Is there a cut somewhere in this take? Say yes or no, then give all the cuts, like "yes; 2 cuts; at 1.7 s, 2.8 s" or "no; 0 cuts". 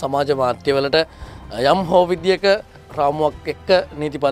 yes; 1 cut; at 2.8 s